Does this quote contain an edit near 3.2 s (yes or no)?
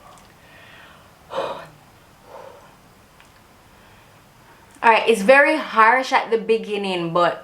no